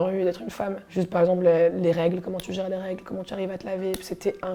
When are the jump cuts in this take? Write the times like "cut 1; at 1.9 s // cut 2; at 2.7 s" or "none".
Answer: none